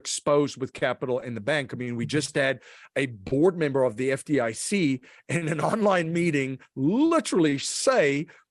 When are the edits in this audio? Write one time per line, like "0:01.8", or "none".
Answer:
none